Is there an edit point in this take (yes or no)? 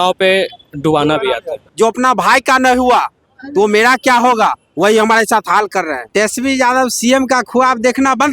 yes